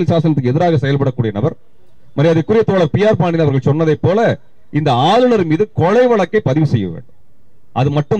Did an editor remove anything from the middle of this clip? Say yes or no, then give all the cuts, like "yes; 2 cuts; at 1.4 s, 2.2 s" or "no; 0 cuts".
no; 0 cuts